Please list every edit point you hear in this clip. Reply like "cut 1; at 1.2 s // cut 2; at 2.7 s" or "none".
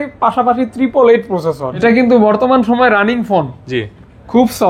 cut 1; at 1.8 s